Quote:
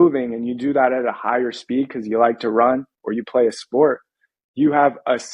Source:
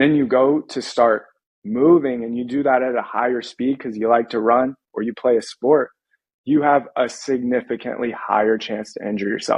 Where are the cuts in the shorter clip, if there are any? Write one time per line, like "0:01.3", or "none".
none